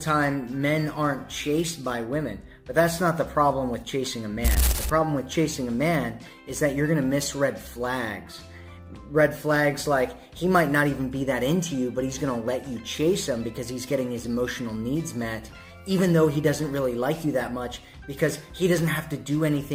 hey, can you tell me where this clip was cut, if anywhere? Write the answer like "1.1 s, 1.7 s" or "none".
none

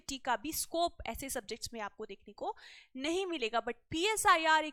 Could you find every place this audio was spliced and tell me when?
none

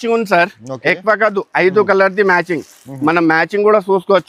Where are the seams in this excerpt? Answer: none

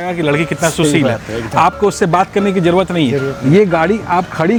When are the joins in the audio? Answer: none

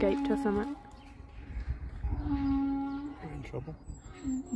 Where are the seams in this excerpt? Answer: none

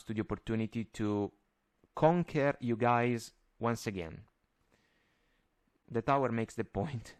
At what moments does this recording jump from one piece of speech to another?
none

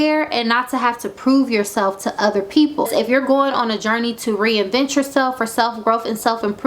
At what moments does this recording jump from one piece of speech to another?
2.9 s

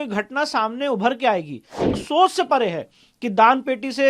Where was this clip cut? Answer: 1.9 s

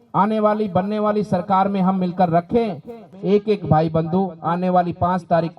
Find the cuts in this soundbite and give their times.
3.1 s

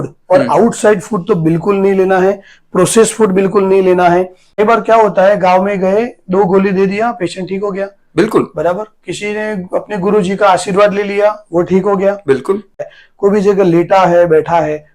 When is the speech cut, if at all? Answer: 4.4 s, 12.9 s

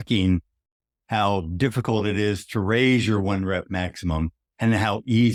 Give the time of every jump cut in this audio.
none

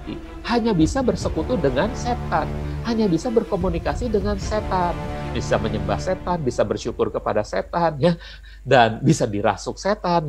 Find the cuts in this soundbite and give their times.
8.4 s

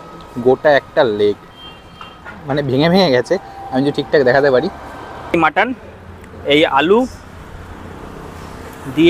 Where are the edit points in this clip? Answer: 5.2 s

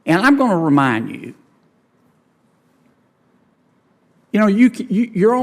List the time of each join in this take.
none

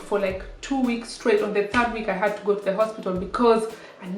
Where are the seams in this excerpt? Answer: none

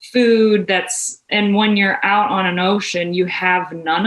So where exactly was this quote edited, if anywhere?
1.3 s

